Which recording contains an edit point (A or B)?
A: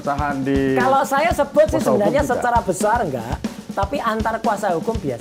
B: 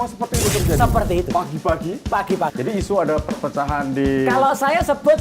B